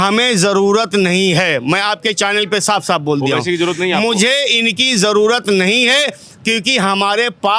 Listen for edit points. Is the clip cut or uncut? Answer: uncut